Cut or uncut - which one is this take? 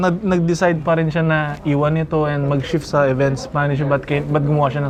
uncut